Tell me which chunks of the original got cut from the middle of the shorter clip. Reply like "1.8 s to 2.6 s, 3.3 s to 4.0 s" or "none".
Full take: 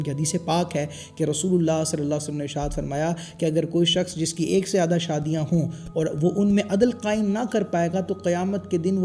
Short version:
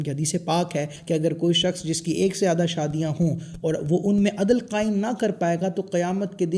1.0 s to 3.3 s